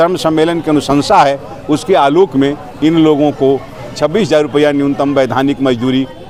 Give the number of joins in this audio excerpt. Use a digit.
0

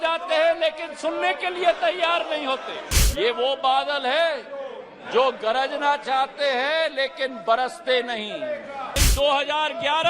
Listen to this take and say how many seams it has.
2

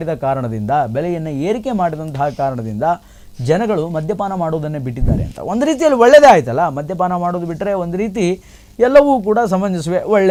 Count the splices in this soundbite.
0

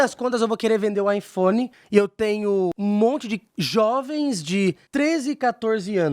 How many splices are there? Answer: 2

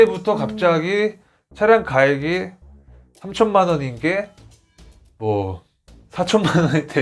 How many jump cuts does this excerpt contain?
0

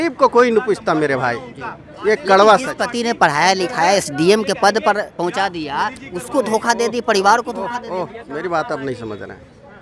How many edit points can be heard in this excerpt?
0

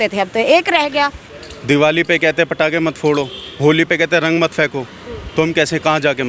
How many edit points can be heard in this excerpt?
1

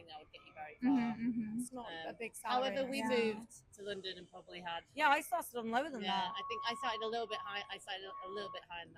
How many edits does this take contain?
0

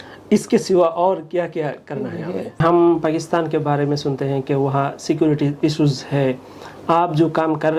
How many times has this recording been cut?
1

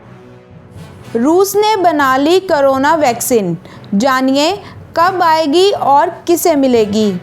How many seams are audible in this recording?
1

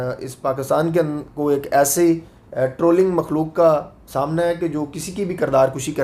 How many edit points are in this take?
0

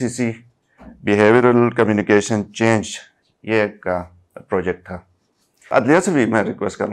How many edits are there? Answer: 1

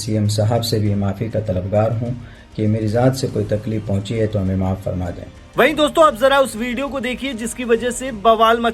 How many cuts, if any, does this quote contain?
0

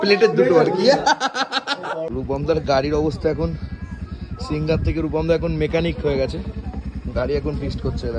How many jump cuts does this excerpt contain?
1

